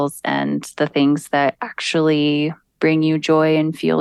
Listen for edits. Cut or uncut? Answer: uncut